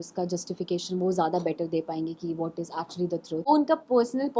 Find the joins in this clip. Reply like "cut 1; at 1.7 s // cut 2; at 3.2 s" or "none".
cut 1; at 3.5 s